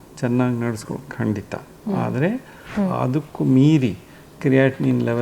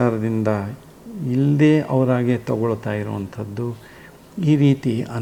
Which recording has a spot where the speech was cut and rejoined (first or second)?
first